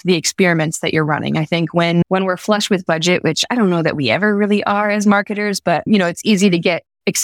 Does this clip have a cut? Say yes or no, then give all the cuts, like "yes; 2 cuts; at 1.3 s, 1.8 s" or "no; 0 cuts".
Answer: no; 0 cuts